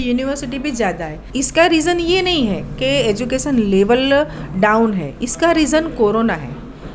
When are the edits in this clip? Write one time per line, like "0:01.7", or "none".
0:01.2